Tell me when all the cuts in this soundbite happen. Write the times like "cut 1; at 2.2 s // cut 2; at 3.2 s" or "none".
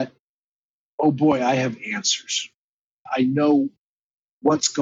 cut 1; at 3.1 s